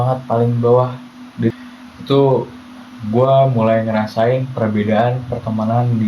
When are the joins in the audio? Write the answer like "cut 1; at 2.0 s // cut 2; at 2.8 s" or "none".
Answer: cut 1; at 1.5 s